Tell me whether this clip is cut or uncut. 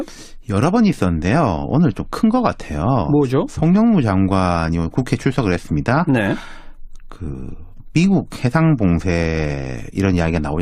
uncut